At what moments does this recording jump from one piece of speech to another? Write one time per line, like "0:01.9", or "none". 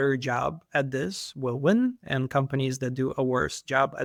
none